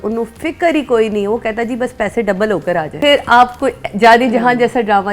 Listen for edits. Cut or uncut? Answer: cut